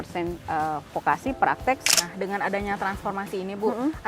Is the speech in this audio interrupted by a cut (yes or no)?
yes